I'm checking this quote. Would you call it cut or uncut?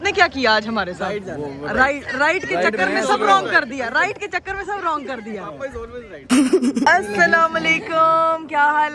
uncut